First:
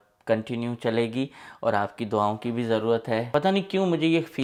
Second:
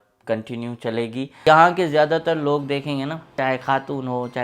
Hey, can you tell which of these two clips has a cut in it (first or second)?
second